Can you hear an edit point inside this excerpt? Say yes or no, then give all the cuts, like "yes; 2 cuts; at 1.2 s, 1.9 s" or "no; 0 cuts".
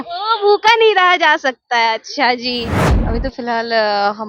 yes; 1 cut; at 2.8 s